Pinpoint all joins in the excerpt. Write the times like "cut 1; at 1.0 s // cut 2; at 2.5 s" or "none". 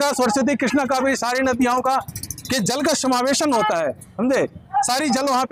none